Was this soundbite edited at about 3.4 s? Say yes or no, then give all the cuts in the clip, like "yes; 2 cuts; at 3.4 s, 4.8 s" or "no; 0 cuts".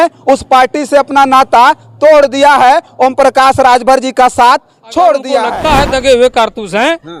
no; 1 cut; at 5.5 s